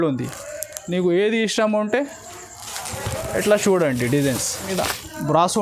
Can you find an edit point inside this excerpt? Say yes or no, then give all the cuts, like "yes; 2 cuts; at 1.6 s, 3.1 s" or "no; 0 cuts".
yes; 1 cut; at 4.7 s